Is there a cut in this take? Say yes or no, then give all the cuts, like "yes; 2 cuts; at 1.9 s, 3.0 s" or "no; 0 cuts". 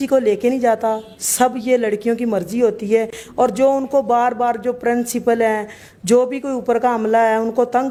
no; 0 cuts